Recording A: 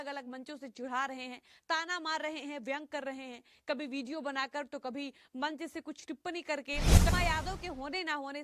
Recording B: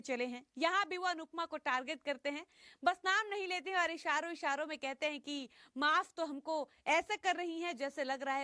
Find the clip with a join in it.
A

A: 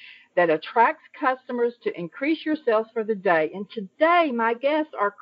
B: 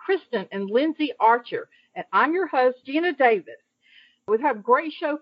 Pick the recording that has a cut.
B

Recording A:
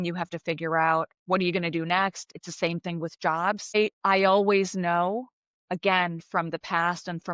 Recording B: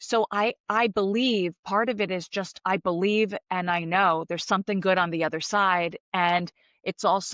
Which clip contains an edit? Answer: A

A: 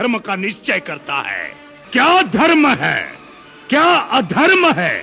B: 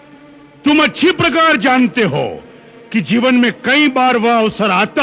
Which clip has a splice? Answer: A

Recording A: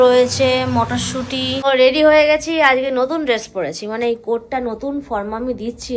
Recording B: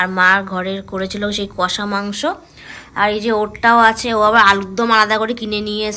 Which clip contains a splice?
A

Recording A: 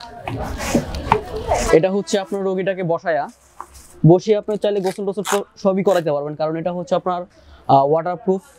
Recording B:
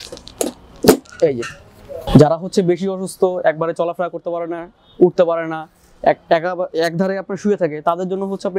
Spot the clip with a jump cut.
B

